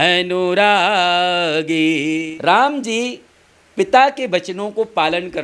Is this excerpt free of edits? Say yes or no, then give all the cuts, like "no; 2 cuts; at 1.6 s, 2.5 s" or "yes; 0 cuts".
no; 1 cut; at 2.2 s